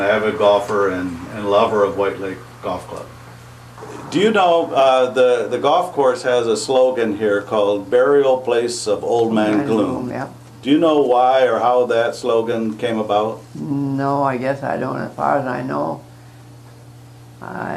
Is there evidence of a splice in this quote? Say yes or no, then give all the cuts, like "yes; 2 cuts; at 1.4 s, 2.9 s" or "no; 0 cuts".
no; 0 cuts